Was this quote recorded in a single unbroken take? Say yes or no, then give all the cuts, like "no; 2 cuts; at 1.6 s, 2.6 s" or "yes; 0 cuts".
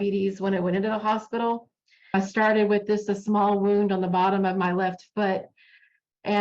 no; 1 cut; at 2.1 s